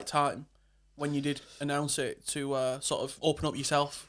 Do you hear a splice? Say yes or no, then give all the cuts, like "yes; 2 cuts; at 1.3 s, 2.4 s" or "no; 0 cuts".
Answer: yes; 1 cut; at 3.1 s